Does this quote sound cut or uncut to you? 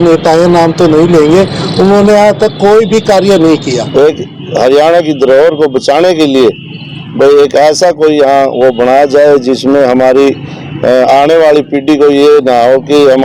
cut